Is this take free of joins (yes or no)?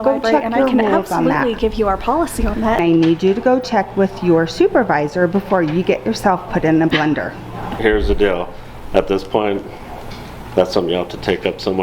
no